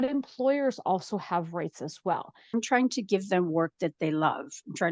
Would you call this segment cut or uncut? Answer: cut